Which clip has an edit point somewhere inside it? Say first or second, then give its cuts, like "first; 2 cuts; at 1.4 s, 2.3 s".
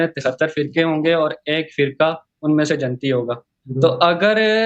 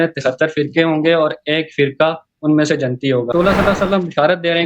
second; 1 cut; at 3.3 s